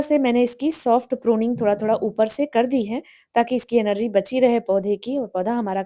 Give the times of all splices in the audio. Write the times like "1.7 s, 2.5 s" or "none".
none

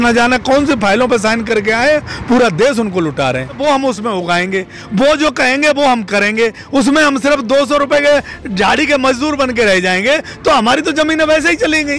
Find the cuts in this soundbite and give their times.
3.6 s

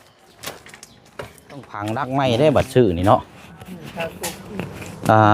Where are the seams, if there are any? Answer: 1.8 s

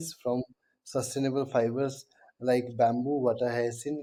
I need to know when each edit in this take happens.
none

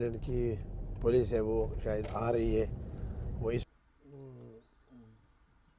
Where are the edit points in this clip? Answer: 3.6 s

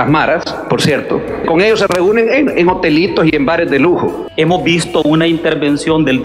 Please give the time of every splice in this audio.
1.5 s, 4.2 s

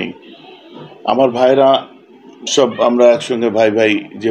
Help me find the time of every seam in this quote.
none

